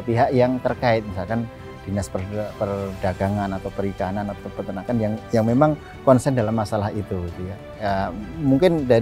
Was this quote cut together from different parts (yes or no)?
no